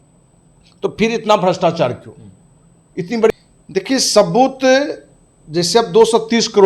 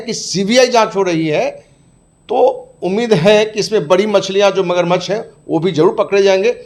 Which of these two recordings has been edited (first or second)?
first